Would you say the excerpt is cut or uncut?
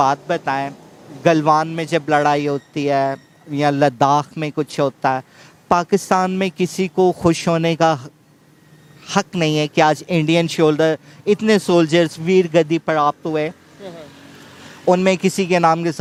uncut